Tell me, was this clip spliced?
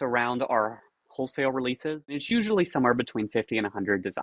yes; 1 cut; at 2.2 s

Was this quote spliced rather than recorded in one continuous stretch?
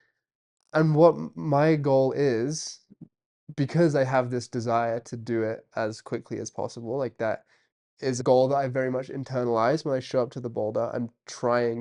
yes; 1 cut; at 8.2 s

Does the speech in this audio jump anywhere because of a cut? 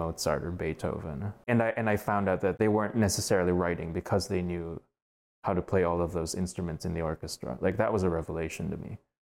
yes; 2 cuts; at 1.4 s, 2.6 s

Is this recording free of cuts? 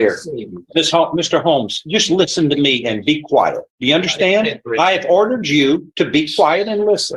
yes; 0 cuts

